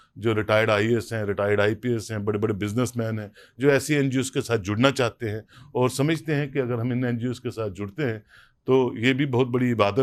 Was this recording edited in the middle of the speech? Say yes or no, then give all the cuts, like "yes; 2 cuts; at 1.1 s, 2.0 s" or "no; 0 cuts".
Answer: no; 0 cuts